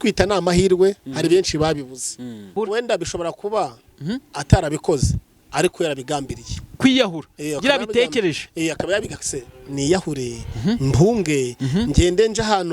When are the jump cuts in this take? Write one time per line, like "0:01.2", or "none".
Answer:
0:02.5